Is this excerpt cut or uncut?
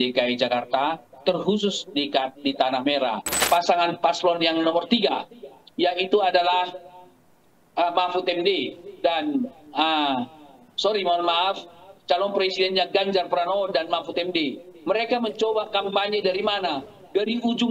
cut